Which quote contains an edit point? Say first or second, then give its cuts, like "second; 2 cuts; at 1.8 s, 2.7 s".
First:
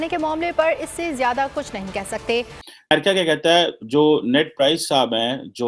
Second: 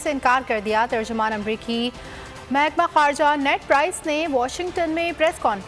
first; 1 cut; at 2.6 s